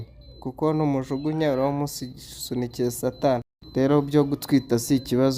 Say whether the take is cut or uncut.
cut